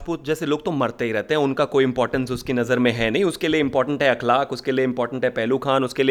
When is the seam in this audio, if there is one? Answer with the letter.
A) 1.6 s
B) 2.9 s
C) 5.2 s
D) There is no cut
D